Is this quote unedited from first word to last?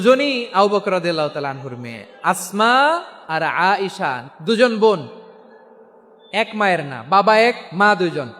no; 2 cuts; at 3.2 s, 4.2 s

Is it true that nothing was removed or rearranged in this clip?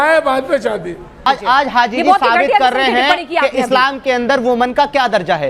no; 1 cut; at 1.3 s

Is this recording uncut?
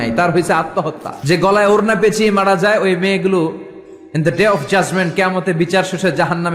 no; 1 cut; at 1.1 s

